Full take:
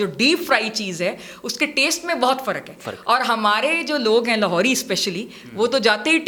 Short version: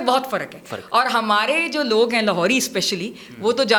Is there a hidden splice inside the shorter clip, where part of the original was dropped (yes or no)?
no